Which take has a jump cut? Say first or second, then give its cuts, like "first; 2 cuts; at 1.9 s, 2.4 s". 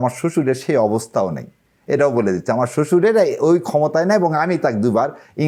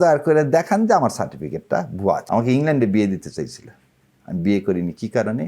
second; 1 cut; at 2.2 s